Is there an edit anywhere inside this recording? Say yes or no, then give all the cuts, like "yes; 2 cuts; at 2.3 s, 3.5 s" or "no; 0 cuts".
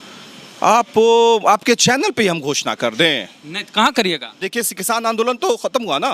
yes; 1 cut; at 4.4 s